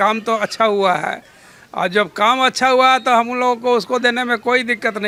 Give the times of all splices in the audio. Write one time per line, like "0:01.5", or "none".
none